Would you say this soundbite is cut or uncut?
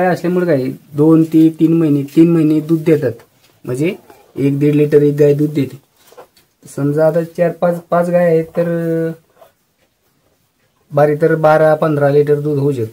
uncut